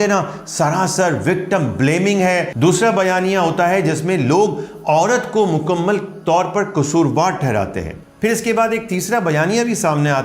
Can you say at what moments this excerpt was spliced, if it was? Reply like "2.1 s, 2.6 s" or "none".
2.5 s, 8.0 s